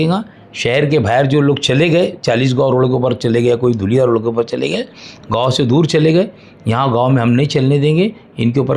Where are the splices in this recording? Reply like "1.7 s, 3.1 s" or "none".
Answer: none